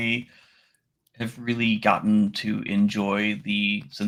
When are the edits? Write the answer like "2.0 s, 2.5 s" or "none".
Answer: none

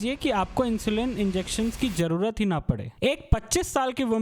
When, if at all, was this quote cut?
2.9 s

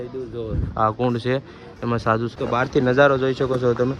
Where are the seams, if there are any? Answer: 2.3 s

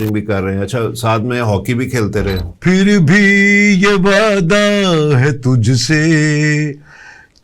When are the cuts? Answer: 2.5 s

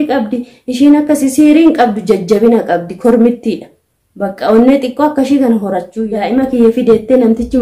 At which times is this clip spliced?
5.9 s

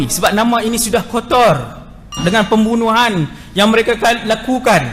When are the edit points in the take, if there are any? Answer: 2.1 s

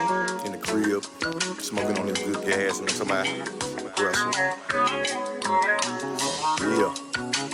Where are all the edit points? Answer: none

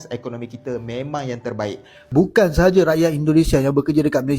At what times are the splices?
1.9 s

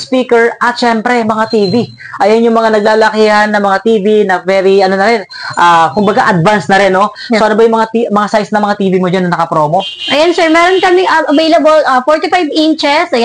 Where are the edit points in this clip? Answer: none

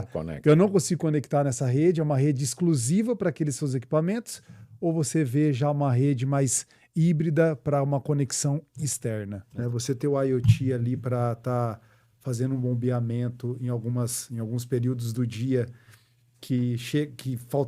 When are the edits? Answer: 9.5 s

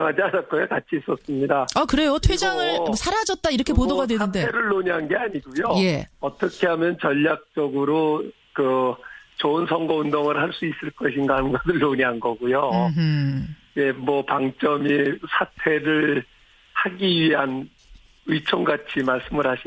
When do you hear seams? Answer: 6.8 s

